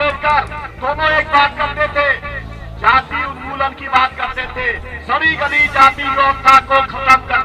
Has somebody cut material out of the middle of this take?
no; 0 cuts

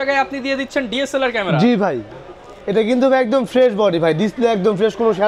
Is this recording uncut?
yes; 0 cuts

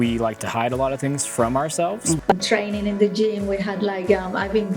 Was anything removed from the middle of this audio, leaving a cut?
yes; 1 cut; at 2.2 s

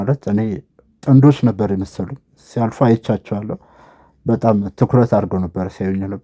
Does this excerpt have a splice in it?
no; 0 cuts

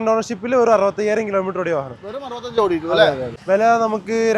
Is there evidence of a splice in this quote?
yes; 1 cut; at 3.3 s

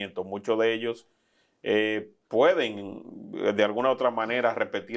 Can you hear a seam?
no; 0 cuts

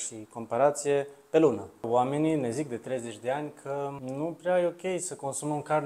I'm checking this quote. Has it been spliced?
yes; 2 cuts; at 1.9 s, 4.0 s

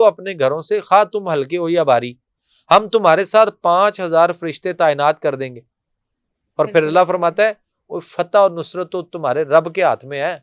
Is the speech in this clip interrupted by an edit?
no; 0 cuts

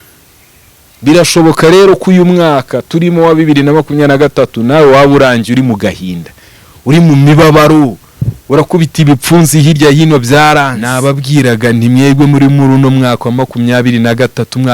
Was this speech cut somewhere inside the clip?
yes; 1 cut; at 10.8 s

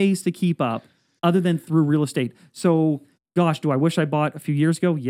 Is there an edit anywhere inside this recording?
no; 0 cuts

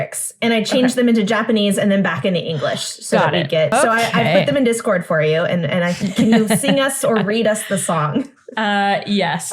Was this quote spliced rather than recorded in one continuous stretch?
yes; 1 cut; at 3.7 s

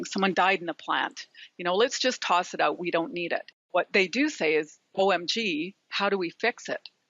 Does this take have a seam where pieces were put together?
yes; 1 cut; at 3.7 s

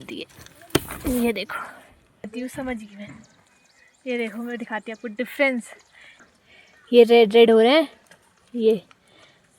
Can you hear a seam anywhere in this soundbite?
yes; 2 cuts; at 2.5 s, 6.1 s

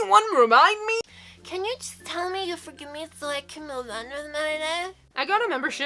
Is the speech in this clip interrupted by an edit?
yes; 2 cuts; at 1.1 s, 5.1 s

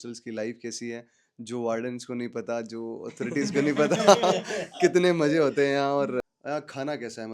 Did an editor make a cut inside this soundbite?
yes; 1 cut; at 6.2 s

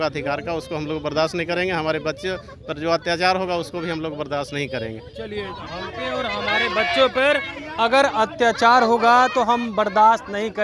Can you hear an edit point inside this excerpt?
no; 0 cuts

